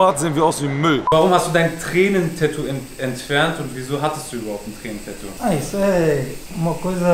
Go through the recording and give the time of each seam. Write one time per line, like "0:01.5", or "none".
0:01.0